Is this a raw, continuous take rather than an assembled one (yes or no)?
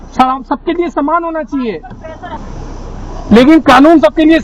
no